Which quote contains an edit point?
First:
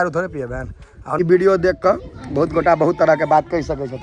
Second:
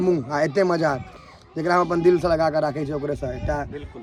first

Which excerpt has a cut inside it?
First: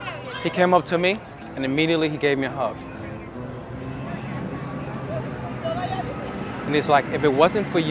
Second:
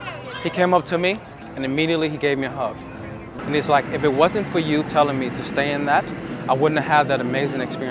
second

